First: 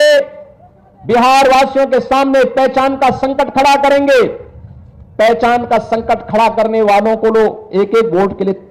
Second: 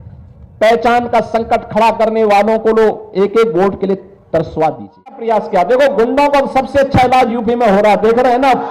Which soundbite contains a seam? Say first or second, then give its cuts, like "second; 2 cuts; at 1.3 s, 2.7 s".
second; 1 cut; at 5.2 s